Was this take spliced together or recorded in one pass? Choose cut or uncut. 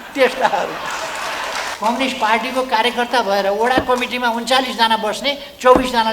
cut